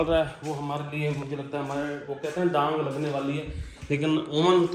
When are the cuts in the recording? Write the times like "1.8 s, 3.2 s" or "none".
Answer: none